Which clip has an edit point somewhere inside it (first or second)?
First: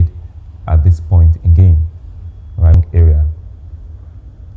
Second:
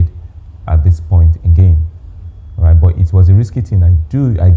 first